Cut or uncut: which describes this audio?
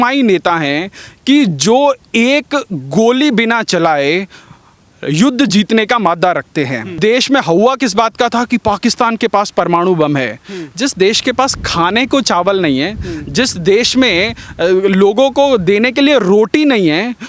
cut